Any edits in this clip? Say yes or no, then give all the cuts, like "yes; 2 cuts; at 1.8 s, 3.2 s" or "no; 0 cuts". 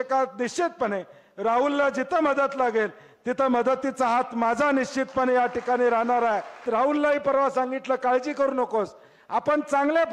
yes; 1 cut; at 6.6 s